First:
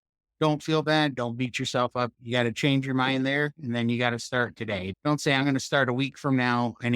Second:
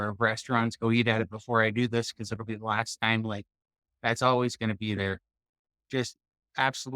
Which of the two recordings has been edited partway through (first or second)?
first